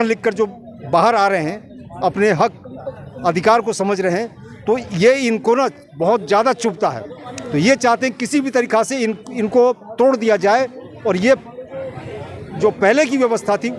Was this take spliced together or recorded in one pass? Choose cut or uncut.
uncut